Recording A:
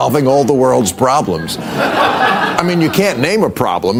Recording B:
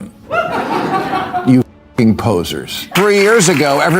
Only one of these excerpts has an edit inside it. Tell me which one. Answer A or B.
B